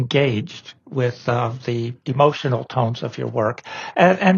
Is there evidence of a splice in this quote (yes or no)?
yes